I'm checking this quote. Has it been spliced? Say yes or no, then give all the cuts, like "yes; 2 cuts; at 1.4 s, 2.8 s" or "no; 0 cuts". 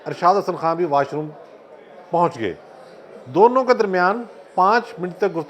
no; 0 cuts